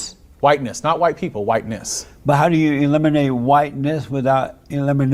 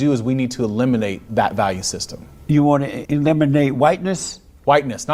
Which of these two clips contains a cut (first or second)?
second